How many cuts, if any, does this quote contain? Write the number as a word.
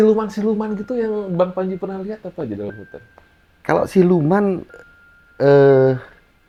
zero